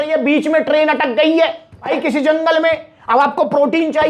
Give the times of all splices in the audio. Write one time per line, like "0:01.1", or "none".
0:01.9